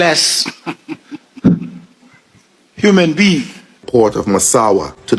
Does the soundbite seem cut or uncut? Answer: cut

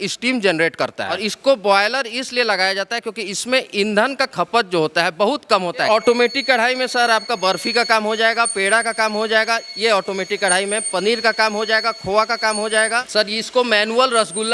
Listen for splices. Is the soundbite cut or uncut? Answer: cut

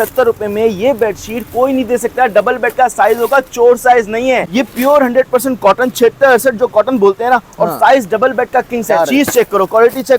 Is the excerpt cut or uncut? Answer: cut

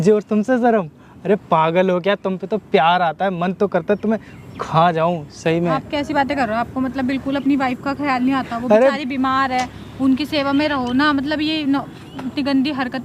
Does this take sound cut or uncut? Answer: uncut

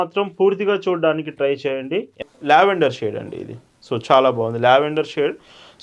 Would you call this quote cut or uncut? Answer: cut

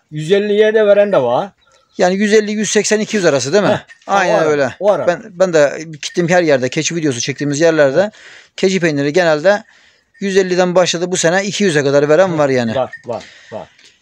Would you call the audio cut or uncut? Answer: uncut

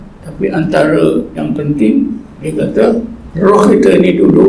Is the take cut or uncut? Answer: cut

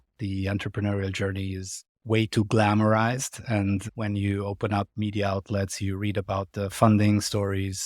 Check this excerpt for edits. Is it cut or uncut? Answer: cut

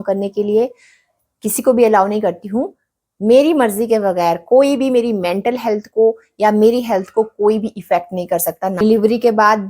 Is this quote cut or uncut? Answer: cut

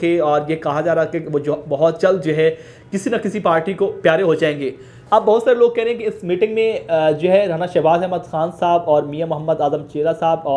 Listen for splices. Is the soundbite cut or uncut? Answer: cut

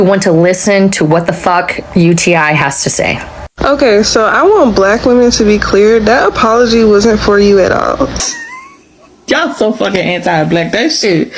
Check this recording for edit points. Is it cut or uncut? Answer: cut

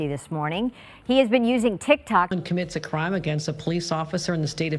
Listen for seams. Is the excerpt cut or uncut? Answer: cut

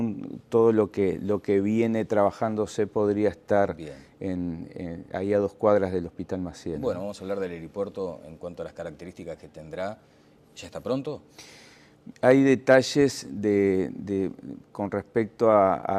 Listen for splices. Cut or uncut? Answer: cut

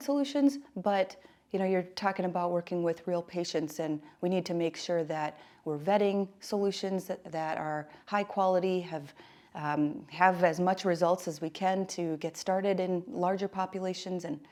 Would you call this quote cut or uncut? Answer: uncut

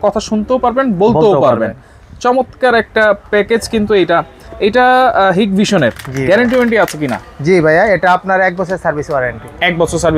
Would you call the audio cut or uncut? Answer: uncut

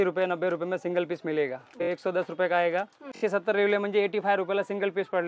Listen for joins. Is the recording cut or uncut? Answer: cut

